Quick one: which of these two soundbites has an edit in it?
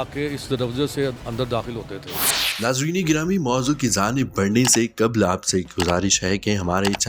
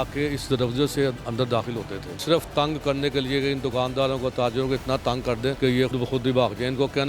second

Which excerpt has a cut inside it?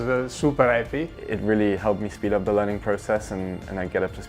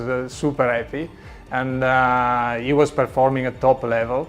first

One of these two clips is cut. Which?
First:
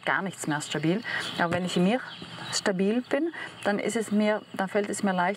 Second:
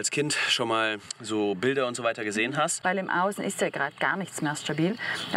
second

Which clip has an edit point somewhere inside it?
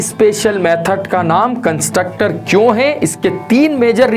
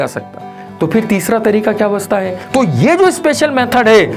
second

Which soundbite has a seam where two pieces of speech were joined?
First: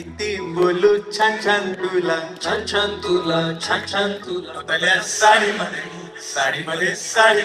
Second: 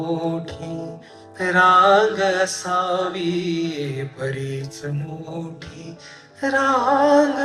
first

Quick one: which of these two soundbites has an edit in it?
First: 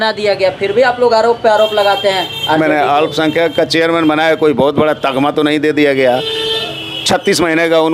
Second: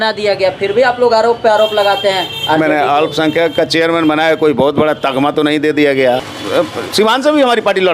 second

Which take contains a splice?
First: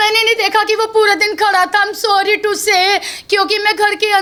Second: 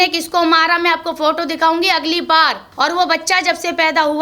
second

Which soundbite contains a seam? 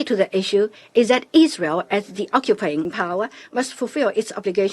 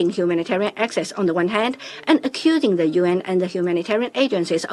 first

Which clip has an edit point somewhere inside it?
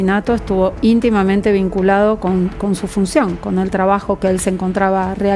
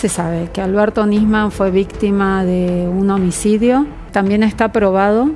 second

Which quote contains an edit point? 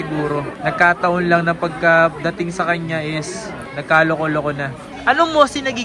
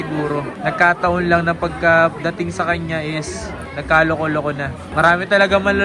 first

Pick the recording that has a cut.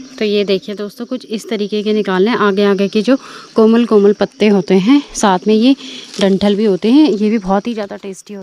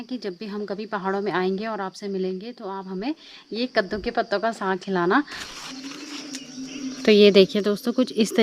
second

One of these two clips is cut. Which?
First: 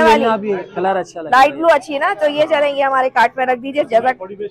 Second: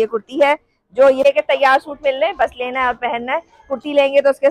second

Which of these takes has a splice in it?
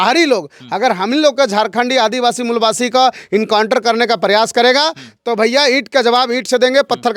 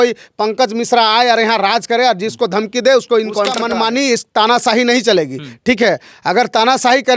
second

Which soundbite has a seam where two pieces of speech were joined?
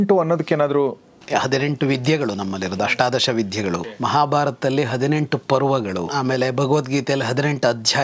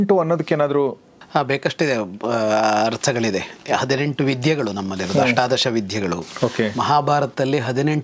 first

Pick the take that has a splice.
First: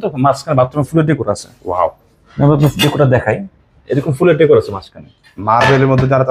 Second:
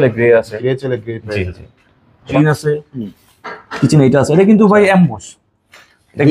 second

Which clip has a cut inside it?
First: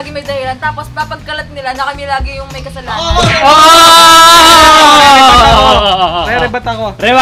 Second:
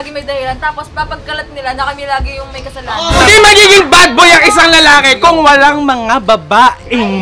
second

